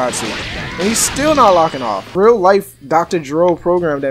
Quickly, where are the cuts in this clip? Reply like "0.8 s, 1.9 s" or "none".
2.0 s